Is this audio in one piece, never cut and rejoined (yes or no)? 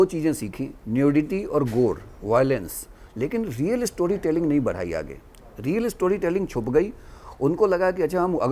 yes